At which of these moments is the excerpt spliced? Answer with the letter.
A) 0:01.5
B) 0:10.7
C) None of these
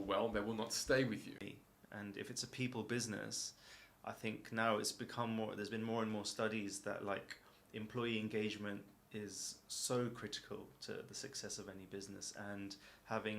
A